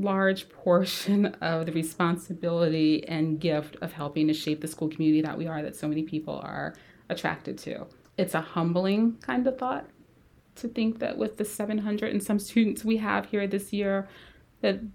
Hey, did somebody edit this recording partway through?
yes; 1 cut; at 8.0 s

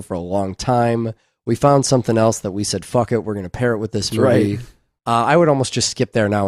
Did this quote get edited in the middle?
no; 0 cuts

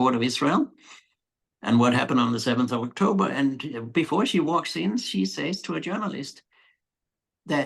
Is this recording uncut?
yes; 0 cuts

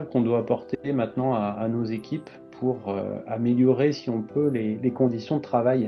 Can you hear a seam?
no; 0 cuts

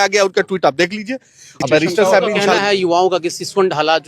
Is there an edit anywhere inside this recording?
yes; 1 cut; at 2.2 s

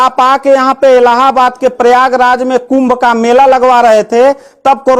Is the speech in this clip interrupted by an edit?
no; 0 cuts

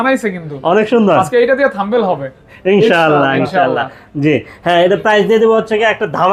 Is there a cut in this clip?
no; 0 cuts

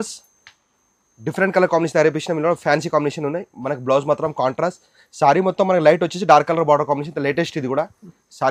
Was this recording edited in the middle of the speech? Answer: no; 0 cuts

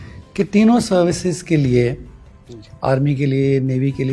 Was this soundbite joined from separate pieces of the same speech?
no; 0 cuts

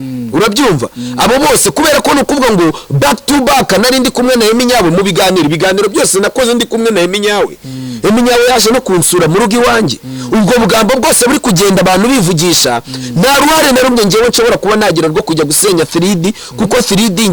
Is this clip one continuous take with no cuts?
yes; 0 cuts

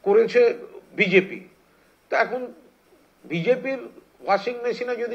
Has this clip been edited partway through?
no; 0 cuts

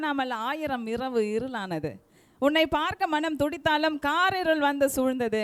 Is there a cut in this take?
no; 0 cuts

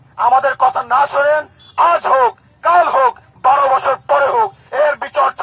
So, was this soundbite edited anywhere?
no; 0 cuts

